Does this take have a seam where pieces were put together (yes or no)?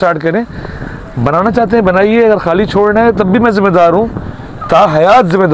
no